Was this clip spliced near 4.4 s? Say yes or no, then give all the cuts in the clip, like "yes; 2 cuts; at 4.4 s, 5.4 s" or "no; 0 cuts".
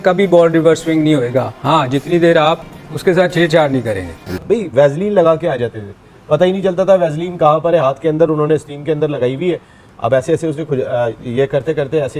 yes; 1 cut; at 4.4 s